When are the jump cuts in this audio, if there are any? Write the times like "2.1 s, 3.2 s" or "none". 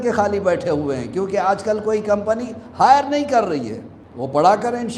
none